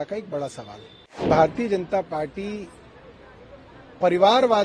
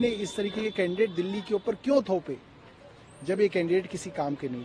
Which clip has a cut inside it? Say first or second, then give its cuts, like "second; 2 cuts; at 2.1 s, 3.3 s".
first; 1 cut; at 1.3 s